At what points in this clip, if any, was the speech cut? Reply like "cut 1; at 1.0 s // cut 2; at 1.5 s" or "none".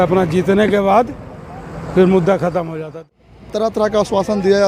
cut 1; at 3.1 s